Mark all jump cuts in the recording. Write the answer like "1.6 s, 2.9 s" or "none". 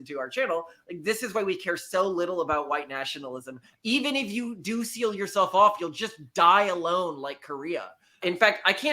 3.6 s, 8.0 s